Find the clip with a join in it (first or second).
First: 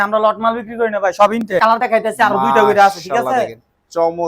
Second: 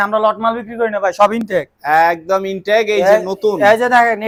first